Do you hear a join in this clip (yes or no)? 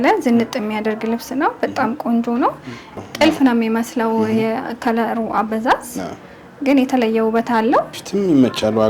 yes